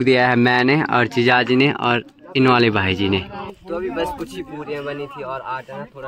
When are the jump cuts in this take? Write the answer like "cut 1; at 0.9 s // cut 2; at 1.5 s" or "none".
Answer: cut 1; at 3.5 s

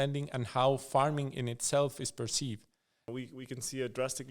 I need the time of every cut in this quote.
cut 1; at 3.1 s

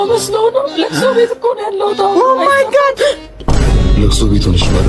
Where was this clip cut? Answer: none

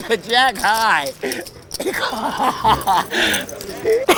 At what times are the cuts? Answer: none

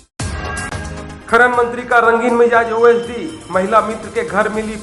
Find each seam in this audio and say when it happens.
cut 1; at 1.1 s

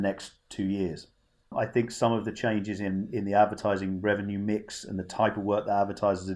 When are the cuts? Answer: cut 1; at 1.5 s

